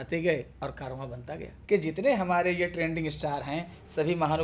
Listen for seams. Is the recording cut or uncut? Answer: cut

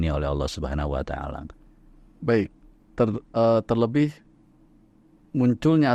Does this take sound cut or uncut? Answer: uncut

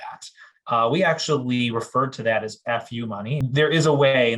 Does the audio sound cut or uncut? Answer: cut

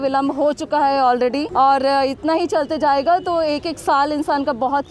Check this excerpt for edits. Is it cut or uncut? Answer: cut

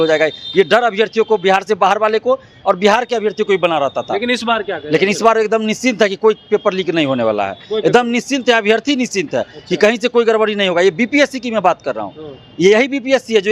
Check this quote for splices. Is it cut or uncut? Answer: uncut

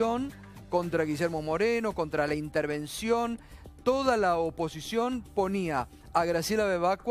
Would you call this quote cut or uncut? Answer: cut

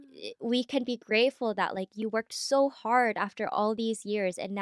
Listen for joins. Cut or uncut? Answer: uncut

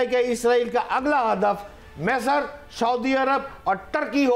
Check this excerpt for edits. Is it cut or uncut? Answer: uncut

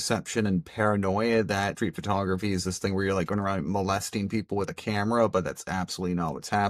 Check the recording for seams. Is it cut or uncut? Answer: uncut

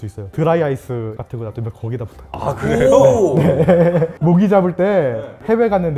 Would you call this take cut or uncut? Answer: cut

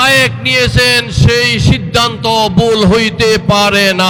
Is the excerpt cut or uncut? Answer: uncut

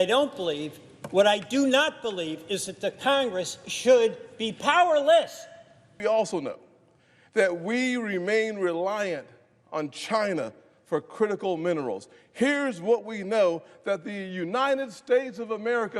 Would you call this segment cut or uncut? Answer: cut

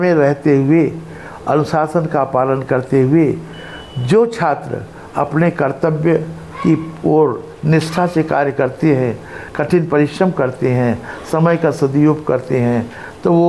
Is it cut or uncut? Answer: uncut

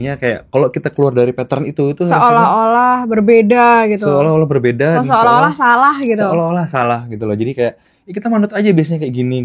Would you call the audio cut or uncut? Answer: uncut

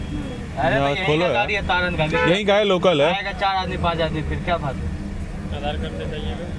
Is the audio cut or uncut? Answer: uncut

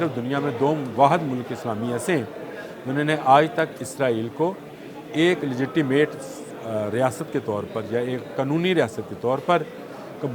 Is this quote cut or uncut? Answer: uncut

